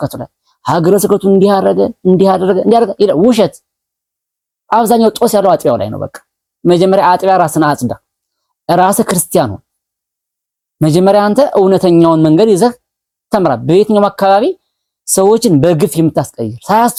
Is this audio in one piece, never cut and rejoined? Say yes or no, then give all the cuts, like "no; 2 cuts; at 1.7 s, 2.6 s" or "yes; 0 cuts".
yes; 0 cuts